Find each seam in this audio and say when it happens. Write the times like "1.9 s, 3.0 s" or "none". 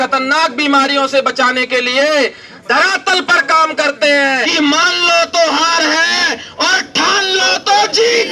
4.5 s